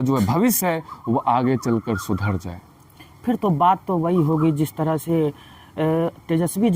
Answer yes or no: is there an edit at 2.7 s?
no